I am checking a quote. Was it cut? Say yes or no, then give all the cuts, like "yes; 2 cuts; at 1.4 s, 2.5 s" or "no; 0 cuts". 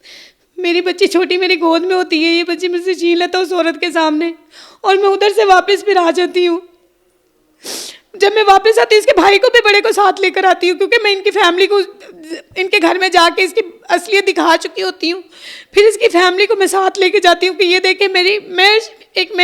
no; 0 cuts